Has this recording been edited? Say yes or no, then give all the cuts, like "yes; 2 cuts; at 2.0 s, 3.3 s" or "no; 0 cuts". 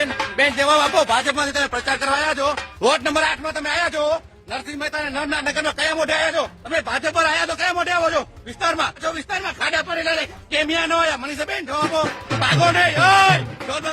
yes; 4 cuts; at 2.7 s, 6.6 s, 9.0 s, 12.2 s